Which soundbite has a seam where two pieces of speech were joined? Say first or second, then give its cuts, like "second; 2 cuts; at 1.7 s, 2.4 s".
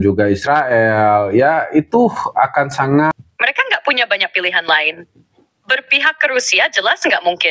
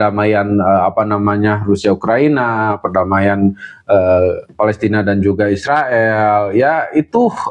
first; 1 cut; at 3.2 s